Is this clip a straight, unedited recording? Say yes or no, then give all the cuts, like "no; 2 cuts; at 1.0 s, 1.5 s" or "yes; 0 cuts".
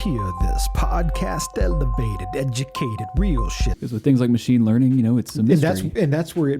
no; 1 cut; at 3.7 s